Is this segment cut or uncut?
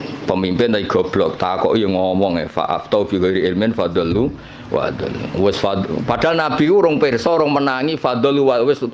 uncut